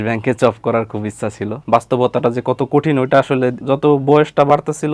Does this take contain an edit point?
yes; 2 cuts; at 1.6 s, 3.6 s

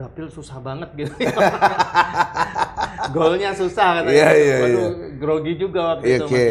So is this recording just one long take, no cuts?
yes; 0 cuts

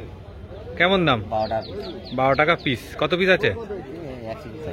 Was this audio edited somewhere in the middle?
no; 0 cuts

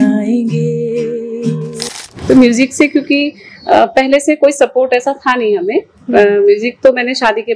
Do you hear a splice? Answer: yes; 1 cut; at 1.8 s

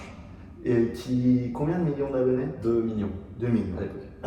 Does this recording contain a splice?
no; 0 cuts

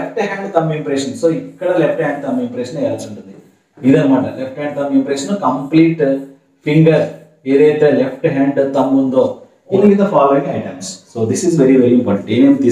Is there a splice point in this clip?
yes; 1 cut; at 9.8 s

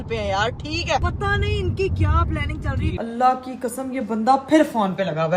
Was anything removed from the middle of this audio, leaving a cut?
yes; 2 cuts; at 1.0 s, 2.9 s

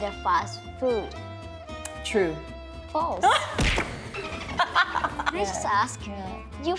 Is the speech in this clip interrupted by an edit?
yes; 1 cut; at 5.3 s

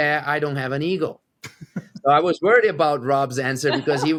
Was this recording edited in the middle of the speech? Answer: no; 0 cuts

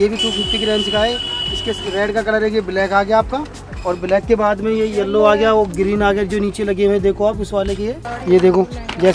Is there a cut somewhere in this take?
yes; 1 cut; at 8.1 s

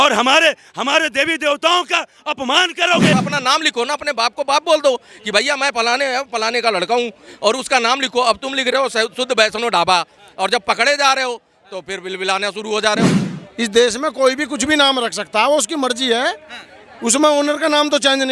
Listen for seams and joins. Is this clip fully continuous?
no; 2 cuts; at 3.1 s, 13.2 s

